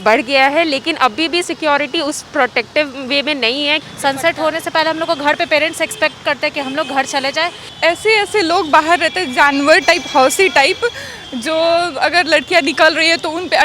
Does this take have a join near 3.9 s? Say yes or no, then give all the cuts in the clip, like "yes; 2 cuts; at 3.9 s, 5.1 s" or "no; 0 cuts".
yes; 2 cuts; at 3.9 s, 7.7 s